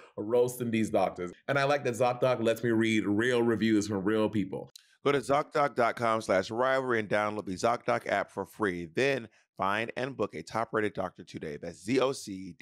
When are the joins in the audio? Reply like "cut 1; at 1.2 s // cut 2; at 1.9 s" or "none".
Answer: cut 1; at 1.3 s